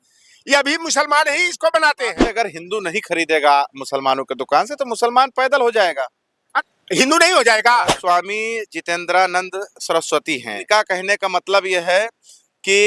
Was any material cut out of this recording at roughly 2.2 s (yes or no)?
yes